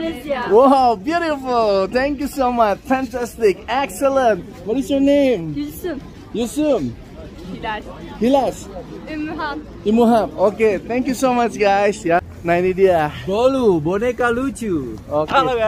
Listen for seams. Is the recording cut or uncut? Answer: cut